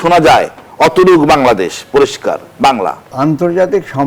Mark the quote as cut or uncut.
cut